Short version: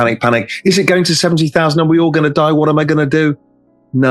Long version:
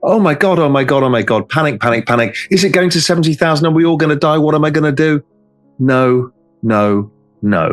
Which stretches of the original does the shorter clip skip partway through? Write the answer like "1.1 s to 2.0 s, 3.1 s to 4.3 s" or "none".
none